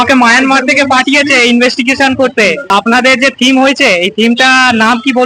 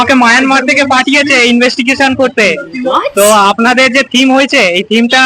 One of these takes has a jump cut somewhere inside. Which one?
first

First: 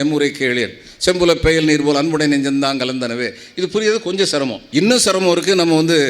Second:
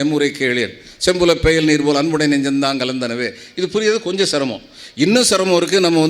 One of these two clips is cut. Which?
first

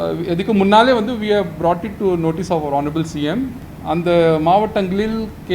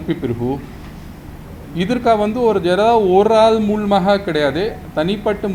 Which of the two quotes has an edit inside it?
first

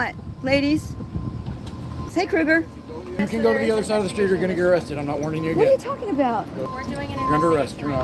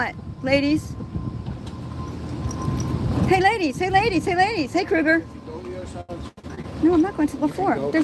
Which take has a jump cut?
first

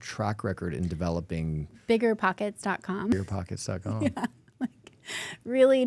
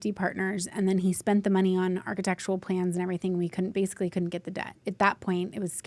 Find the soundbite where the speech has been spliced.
second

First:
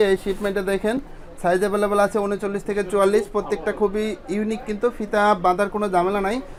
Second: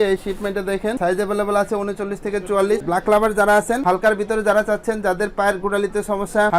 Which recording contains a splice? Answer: second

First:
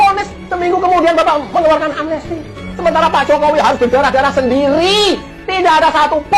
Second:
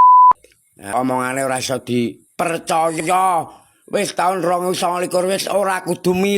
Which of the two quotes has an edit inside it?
second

